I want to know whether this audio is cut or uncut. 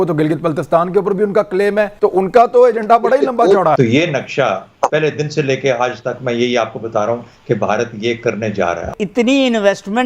cut